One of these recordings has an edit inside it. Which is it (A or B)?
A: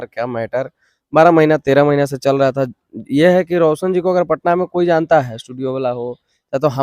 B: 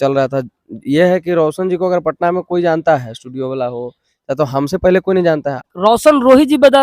B